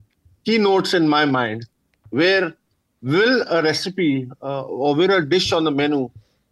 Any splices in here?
no; 0 cuts

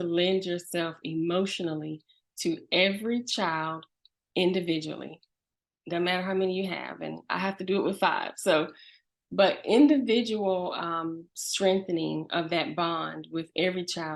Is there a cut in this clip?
no; 0 cuts

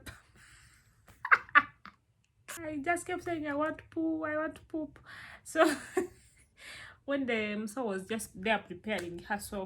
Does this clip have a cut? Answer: yes; 1 cut; at 2.5 s

